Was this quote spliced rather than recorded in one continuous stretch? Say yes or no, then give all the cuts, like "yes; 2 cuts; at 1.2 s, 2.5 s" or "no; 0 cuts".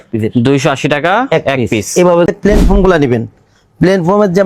yes; 1 cut; at 2.3 s